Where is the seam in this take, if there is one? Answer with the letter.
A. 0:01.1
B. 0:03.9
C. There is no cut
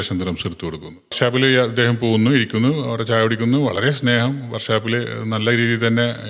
A